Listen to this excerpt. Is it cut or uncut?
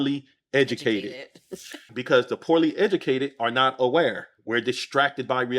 cut